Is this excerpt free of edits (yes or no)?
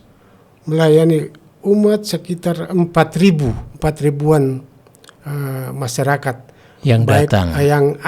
yes